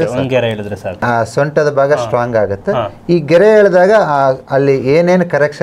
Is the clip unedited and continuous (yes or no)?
no